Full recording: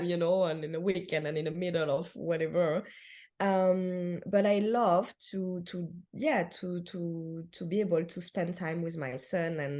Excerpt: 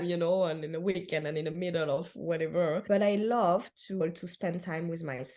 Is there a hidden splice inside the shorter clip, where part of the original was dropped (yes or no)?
yes